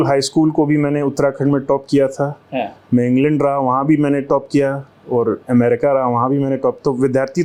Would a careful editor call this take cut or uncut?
uncut